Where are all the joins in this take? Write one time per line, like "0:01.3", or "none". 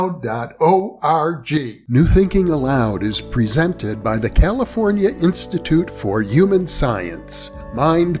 0:01.8